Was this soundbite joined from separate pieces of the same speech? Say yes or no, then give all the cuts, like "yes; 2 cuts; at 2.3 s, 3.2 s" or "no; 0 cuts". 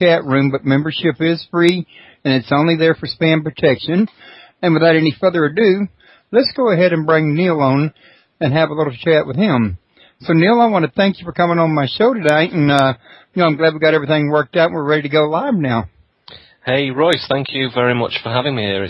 yes; 1 cut; at 7.0 s